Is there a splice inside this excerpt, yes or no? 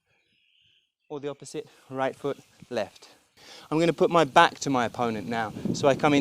yes